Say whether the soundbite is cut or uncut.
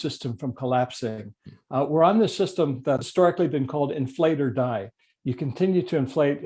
cut